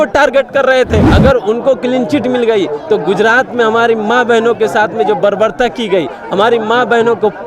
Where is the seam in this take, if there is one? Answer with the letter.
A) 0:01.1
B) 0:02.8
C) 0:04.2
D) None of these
A